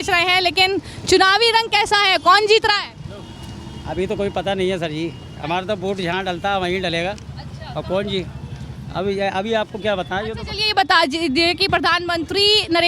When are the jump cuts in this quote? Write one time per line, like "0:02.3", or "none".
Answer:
none